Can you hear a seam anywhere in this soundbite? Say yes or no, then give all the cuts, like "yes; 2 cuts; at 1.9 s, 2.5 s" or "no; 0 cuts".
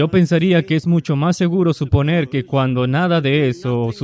no; 0 cuts